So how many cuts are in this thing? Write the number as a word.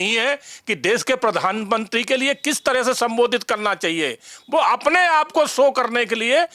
zero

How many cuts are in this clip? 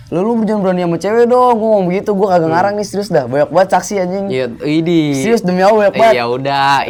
zero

